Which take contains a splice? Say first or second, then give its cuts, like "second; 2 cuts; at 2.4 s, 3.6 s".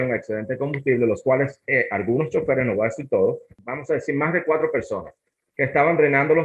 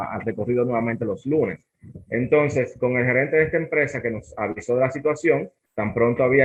first; 1 cut; at 3.5 s